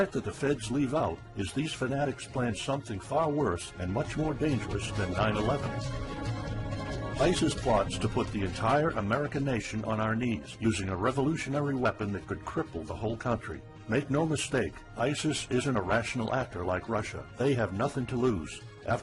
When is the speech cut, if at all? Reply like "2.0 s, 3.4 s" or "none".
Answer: 11.6 s

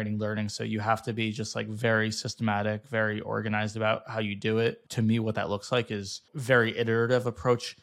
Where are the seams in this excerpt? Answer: 4.8 s, 6.3 s

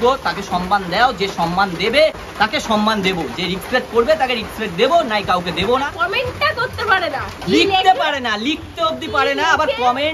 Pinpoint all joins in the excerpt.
2.2 s, 5.9 s

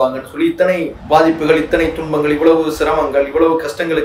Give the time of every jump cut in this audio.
0.9 s

